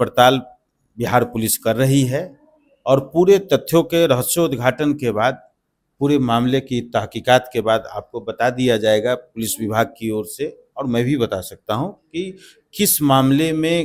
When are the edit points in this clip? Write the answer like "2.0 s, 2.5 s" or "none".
none